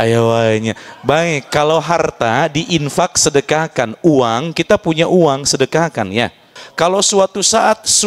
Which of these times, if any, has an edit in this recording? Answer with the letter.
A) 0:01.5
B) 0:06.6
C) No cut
B